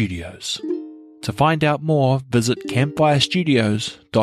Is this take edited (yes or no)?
yes